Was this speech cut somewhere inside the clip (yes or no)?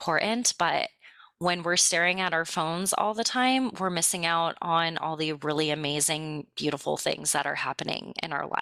no